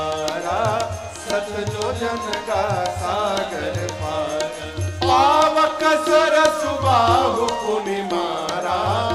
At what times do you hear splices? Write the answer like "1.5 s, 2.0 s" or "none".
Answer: none